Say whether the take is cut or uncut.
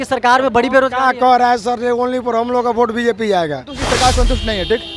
cut